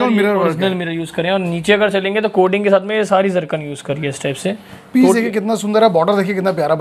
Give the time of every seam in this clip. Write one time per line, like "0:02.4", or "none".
none

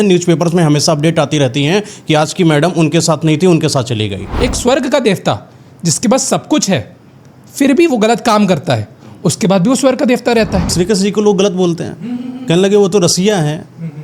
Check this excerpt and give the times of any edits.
0:04.2
0:10.7

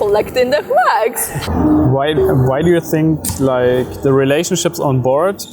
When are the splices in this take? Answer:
0:01.4

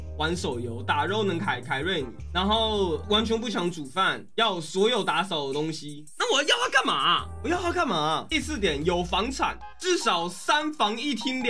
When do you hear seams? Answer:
0:08.3

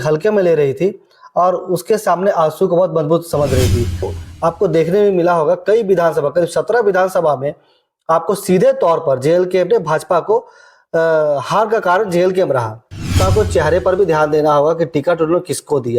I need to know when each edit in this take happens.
0:04.1
0:13.2

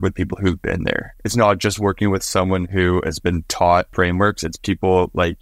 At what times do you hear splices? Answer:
0:01.1
0:03.9

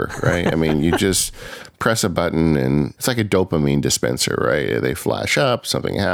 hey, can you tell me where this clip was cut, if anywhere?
0:03.0

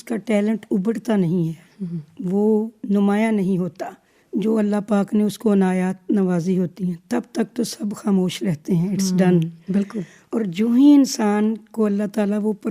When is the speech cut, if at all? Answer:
none

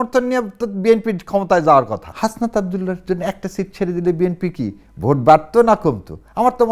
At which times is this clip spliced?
0:02.1

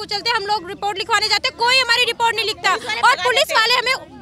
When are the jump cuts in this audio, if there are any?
none

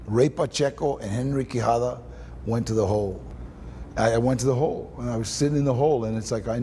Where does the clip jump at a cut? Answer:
0:03.4

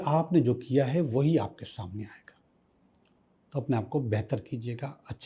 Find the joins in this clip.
none

